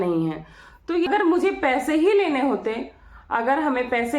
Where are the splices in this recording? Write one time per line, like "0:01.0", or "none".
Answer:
0:01.1